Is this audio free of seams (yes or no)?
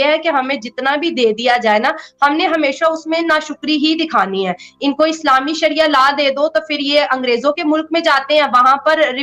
yes